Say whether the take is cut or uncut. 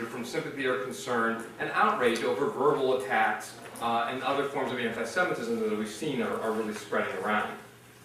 uncut